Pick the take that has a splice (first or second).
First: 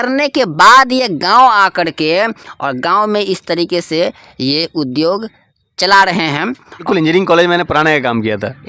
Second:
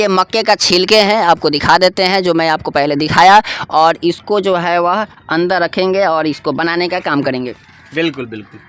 first